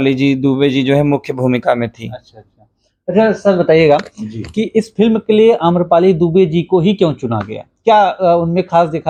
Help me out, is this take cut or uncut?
uncut